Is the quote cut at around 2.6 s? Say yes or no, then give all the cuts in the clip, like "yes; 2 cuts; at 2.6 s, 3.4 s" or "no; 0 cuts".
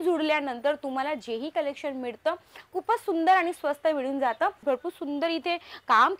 no; 1 cut; at 4.6 s